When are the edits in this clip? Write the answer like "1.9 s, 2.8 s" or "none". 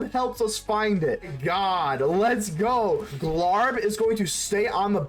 1.3 s, 3.1 s